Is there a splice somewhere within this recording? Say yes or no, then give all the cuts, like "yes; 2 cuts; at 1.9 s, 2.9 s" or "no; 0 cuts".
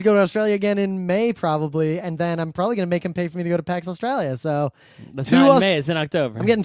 yes; 1 cut; at 3.7 s